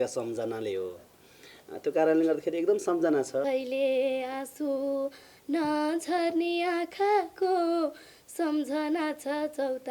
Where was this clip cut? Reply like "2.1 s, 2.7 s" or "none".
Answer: 3.4 s